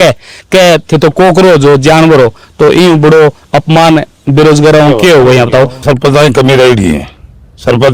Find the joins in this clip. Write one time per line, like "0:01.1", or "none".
0:05.8